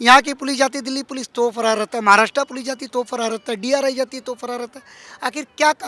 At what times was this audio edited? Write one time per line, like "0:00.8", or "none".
none